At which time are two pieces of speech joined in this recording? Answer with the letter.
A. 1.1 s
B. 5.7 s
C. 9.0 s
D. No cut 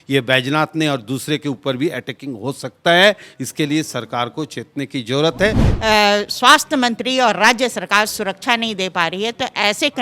B